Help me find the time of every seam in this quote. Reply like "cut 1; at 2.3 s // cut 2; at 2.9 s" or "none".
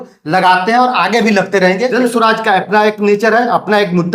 cut 1; at 1.9 s